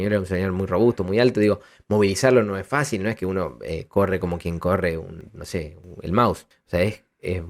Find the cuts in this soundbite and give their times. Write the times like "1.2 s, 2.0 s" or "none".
5.7 s, 6.5 s